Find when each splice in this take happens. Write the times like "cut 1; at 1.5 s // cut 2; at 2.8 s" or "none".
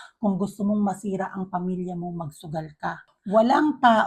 cut 1; at 3.1 s